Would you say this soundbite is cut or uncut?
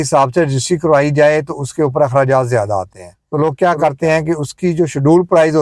uncut